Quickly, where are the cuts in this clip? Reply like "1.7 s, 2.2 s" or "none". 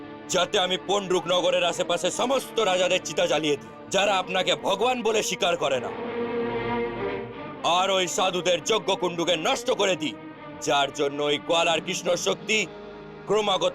5.9 s, 7.2 s